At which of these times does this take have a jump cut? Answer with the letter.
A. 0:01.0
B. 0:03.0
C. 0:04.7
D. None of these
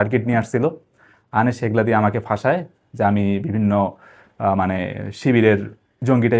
D